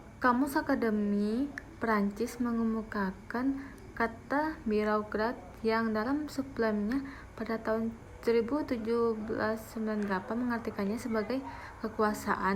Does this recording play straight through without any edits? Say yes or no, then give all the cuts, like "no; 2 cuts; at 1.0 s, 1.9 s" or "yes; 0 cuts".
yes; 0 cuts